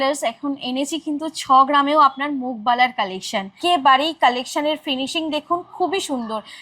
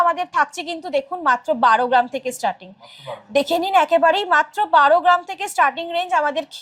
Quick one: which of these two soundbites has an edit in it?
first; 1 cut; at 3.6 s

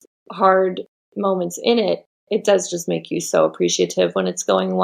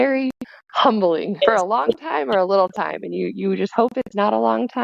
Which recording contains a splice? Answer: second; 1 cut; at 1.4 s

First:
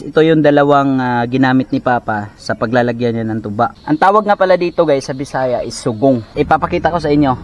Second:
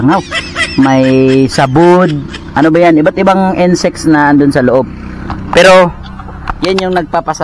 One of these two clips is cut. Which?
first; 2 cuts; at 3.8 s, 6.3 s

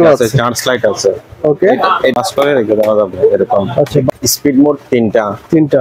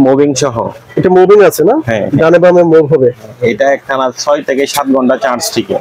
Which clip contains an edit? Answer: first; 2 cuts; at 2.2 s, 4.1 s

